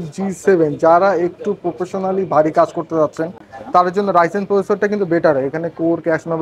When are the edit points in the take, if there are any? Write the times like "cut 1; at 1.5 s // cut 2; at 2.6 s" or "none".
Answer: none